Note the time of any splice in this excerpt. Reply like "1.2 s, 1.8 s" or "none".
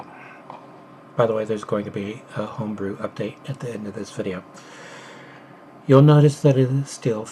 6.2 s

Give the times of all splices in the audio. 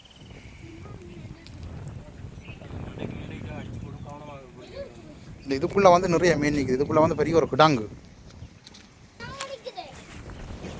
9.2 s

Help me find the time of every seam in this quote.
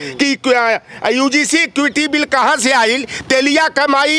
none

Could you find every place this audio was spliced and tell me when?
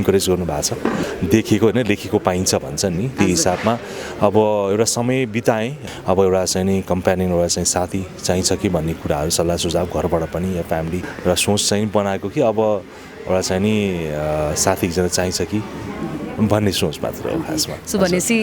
1.0 s, 5.8 s, 11.1 s

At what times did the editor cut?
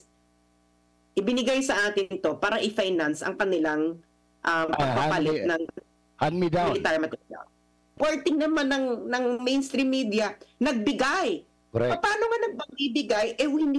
7.9 s

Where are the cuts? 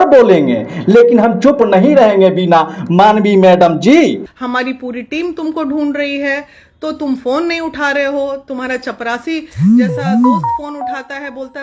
4.3 s

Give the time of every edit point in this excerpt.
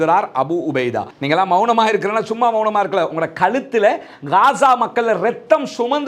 1.1 s

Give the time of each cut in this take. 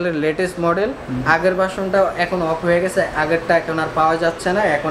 none

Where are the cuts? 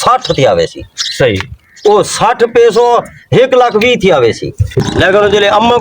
4.8 s

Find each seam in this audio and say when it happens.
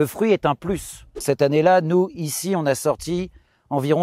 1.2 s

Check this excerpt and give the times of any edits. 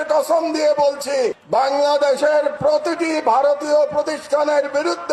none

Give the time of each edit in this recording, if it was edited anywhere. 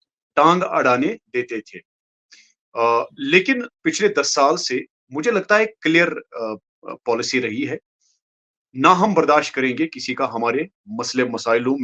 none

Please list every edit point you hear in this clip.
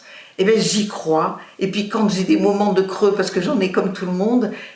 none

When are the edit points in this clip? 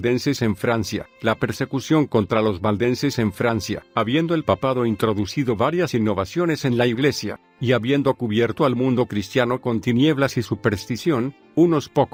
none

